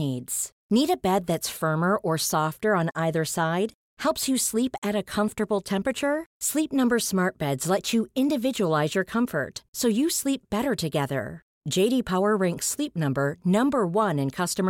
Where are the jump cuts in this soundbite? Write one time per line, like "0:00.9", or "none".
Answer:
none